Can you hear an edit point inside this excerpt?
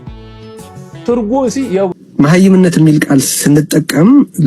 yes; 1 cut; at 1.9 s

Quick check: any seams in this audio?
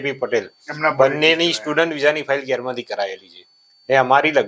no; 0 cuts

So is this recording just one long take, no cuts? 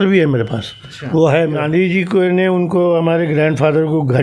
no; 1 cut; at 1.6 s

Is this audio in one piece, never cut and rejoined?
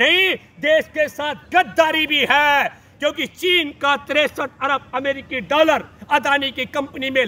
yes; 0 cuts

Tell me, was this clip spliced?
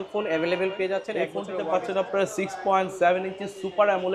yes; 1 cut; at 1.4 s

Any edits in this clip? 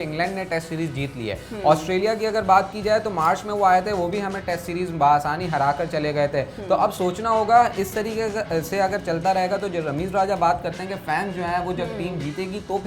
no; 0 cuts

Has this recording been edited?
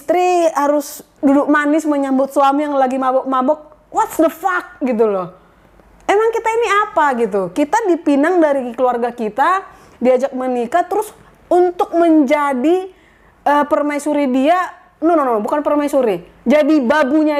no; 0 cuts

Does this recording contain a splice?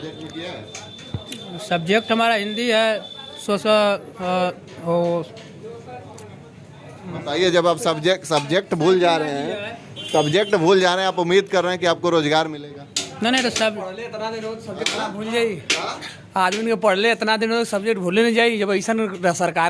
no; 0 cuts

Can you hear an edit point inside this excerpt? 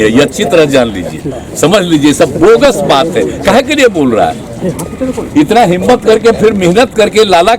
no; 0 cuts

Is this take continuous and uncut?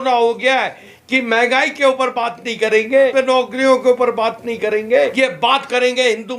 no; 3 cuts; at 0.9 s, 3.1 s, 5.1 s

